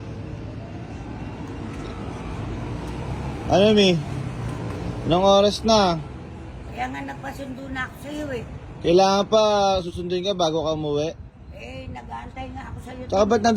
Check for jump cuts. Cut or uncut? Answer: uncut